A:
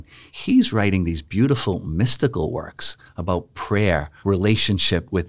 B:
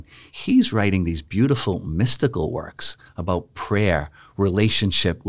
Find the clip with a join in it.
A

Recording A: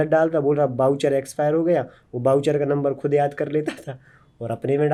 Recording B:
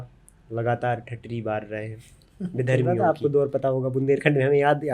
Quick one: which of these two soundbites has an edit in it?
B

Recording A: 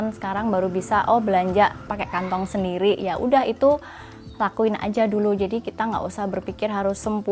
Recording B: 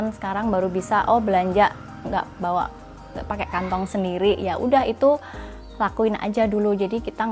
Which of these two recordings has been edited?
A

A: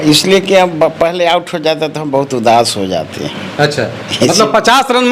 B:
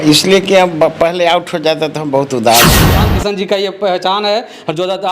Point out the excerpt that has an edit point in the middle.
B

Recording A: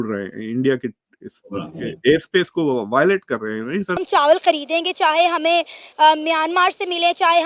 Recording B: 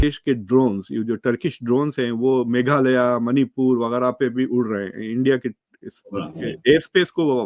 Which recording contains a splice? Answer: A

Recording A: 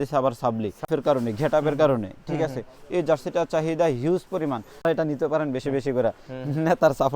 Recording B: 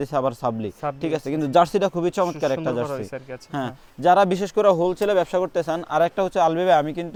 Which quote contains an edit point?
A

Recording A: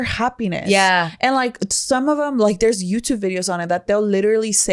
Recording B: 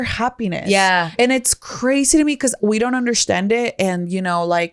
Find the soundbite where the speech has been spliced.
B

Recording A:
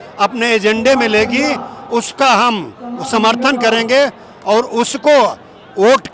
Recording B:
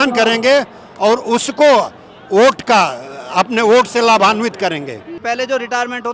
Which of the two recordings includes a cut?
B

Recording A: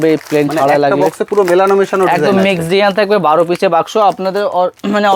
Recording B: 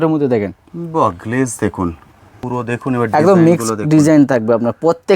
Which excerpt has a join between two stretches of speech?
B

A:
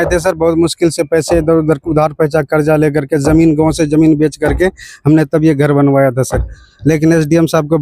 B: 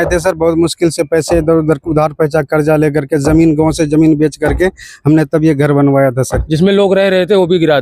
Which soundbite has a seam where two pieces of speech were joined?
B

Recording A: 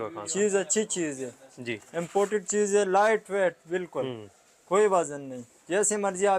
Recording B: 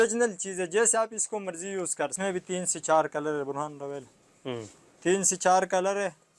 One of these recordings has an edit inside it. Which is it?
B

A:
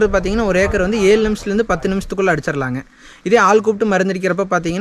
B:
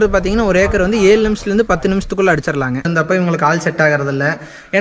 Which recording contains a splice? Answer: B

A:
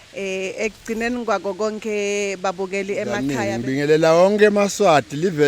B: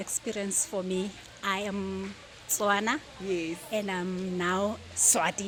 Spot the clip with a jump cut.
A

